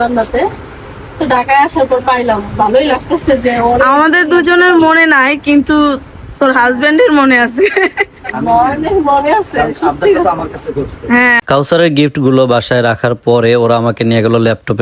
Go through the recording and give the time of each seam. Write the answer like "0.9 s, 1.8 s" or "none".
11.4 s